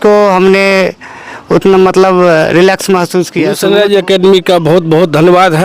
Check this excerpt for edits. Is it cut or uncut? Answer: cut